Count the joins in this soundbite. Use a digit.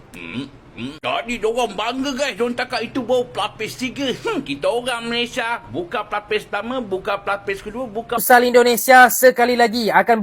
1